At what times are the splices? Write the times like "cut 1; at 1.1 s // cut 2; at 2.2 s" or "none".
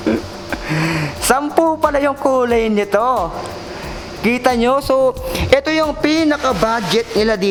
none